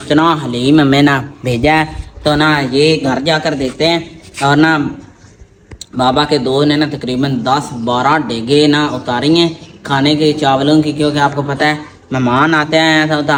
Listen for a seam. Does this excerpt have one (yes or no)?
no